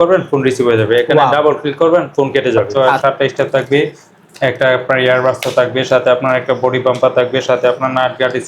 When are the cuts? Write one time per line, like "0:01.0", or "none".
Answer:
0:02.8